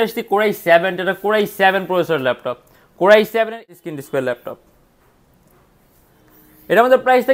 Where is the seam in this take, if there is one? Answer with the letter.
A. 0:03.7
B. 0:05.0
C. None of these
A